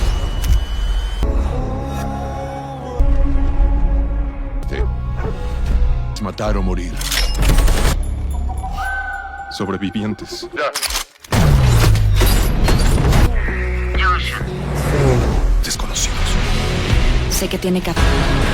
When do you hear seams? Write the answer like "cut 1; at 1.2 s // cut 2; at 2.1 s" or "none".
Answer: cut 1; at 1.1 s